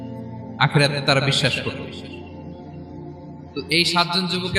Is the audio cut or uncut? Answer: uncut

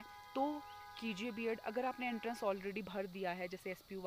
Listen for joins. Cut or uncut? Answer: uncut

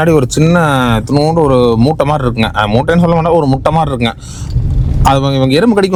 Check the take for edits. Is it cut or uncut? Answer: uncut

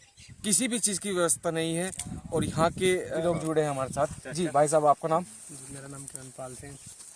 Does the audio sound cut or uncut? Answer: cut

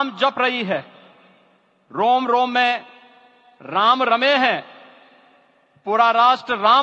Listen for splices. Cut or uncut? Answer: uncut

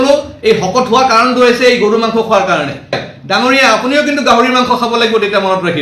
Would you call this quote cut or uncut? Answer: cut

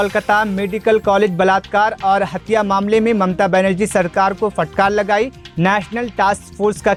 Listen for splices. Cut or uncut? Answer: uncut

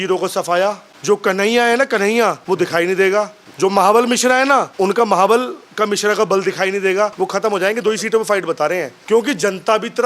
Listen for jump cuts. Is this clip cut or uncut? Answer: cut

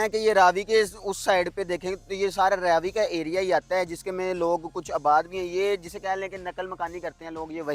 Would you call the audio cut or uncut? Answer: uncut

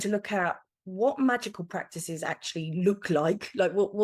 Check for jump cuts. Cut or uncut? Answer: uncut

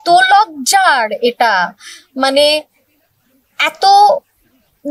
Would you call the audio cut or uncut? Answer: uncut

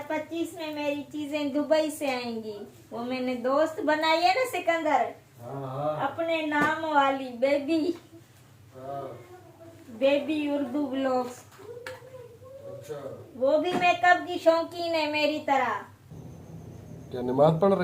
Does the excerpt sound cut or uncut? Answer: cut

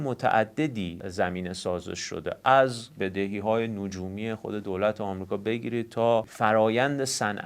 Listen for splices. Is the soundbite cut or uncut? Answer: cut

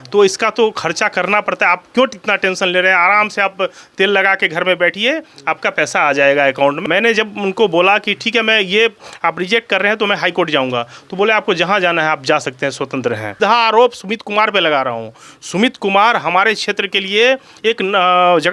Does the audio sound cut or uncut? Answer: cut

